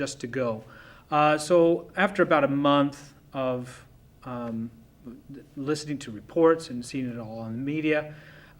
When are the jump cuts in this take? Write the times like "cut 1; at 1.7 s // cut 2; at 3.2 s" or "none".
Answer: cut 1; at 4.8 s